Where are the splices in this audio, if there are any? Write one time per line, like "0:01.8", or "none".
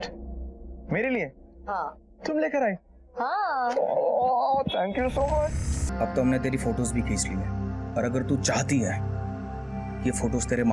0:05.8